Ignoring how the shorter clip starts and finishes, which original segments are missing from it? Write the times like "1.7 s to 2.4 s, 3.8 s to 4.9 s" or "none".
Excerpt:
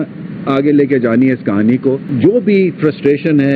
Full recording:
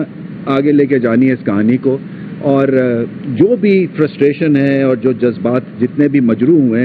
2.1 s to 3.2 s